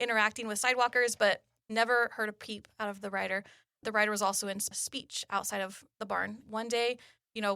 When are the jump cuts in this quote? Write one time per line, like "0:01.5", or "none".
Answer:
0:06.4